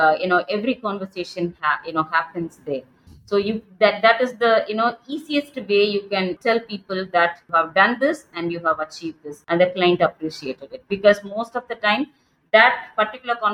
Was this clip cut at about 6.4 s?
yes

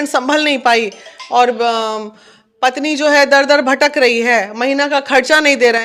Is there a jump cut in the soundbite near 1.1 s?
no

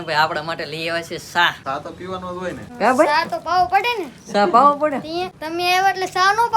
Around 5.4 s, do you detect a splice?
yes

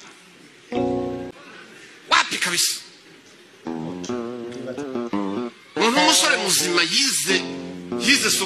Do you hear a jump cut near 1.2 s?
yes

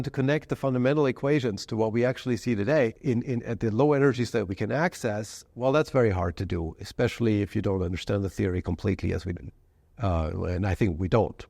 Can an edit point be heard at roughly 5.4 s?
no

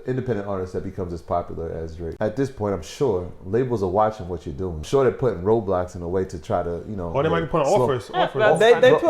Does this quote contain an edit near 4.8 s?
yes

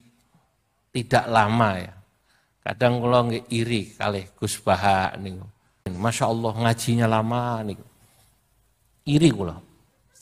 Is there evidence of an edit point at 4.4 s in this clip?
no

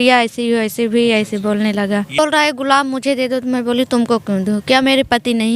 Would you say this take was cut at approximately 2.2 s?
yes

